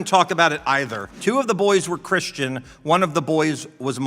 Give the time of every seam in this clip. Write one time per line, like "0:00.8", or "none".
0:01.1